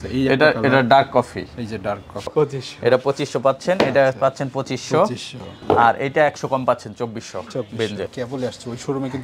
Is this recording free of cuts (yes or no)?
no